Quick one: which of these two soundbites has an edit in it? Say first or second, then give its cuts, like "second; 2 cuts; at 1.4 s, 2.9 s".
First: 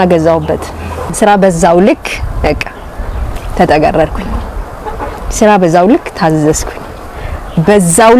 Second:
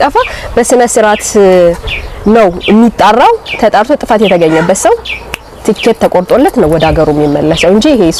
first; 1 cut; at 1.1 s